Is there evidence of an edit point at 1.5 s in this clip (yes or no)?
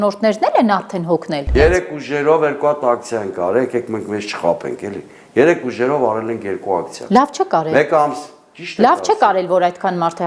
yes